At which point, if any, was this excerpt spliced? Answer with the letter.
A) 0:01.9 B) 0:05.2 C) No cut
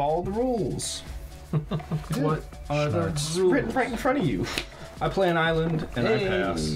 C